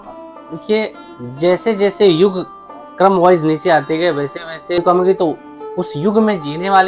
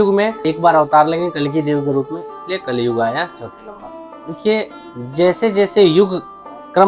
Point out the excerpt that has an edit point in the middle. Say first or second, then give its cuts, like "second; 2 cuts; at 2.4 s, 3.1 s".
first; 1 cut; at 4.8 s